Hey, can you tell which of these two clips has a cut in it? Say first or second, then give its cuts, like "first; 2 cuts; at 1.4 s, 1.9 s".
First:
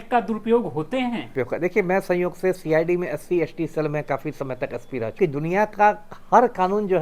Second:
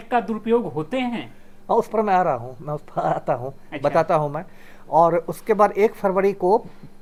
first; 2 cuts; at 1.3 s, 5.2 s